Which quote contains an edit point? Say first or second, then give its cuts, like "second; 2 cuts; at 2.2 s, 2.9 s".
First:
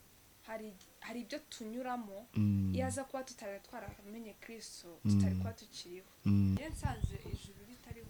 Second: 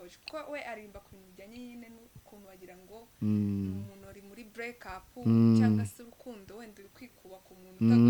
first; 1 cut; at 6.6 s